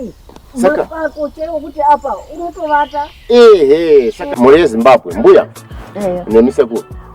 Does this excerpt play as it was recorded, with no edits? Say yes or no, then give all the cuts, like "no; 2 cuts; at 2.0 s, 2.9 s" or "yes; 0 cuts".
no; 1 cut; at 4.3 s